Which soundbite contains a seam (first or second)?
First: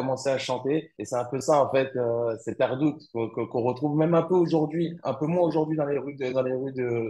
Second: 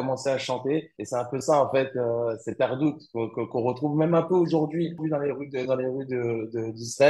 second